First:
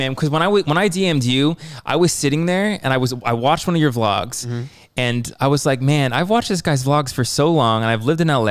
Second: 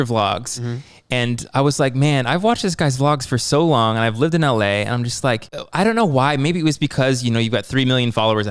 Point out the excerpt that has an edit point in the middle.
second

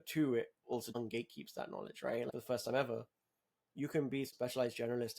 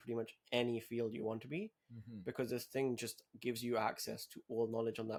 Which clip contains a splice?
first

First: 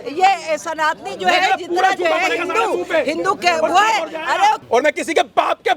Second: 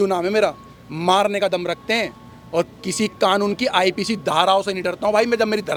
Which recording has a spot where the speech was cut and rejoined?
first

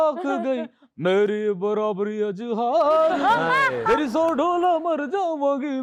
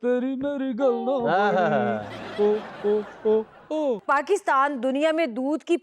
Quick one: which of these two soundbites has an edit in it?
second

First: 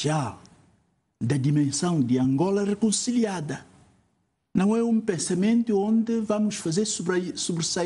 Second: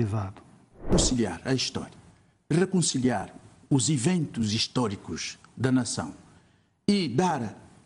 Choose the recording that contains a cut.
second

